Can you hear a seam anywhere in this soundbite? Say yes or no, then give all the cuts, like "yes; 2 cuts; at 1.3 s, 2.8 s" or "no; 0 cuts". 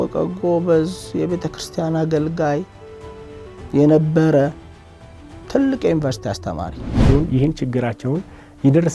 yes; 1 cut; at 7.0 s